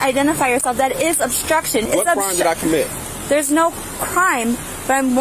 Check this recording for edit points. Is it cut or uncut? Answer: cut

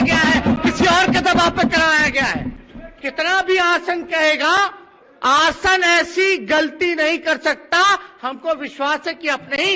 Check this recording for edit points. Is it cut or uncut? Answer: uncut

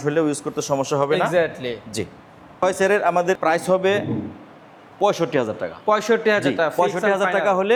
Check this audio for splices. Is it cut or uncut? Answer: uncut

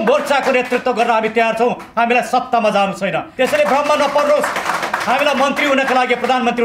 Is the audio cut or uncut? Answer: cut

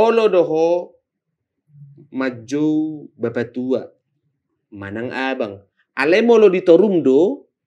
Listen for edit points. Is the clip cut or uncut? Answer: uncut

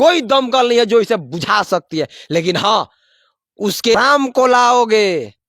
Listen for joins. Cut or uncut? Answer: cut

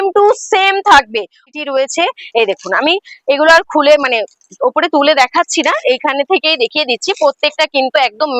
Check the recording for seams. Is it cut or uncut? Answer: cut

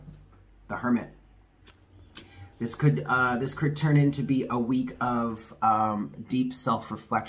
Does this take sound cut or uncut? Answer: uncut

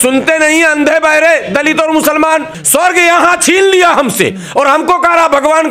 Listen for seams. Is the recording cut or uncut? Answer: cut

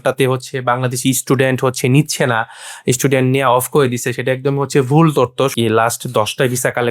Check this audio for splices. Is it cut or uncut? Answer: cut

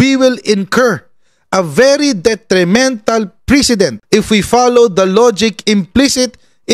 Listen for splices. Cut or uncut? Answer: uncut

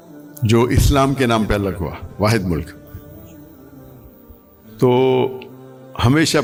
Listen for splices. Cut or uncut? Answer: uncut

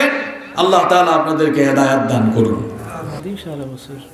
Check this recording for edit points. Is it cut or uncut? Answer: cut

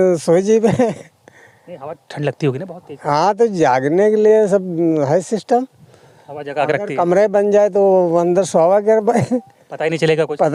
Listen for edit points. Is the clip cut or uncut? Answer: uncut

